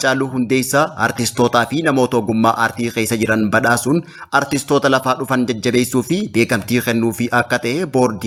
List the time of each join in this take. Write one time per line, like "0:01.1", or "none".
none